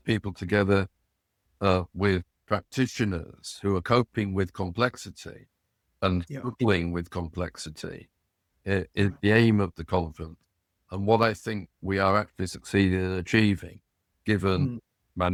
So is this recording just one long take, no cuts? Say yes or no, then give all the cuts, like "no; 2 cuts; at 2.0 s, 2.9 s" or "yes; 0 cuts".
yes; 0 cuts